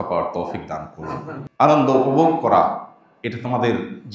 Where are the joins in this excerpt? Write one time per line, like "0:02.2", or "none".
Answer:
0:01.4